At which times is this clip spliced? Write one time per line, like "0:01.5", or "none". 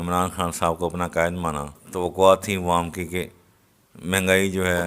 0:01.8